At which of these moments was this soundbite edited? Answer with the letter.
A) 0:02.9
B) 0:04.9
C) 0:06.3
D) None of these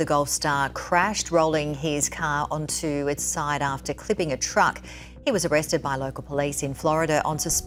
D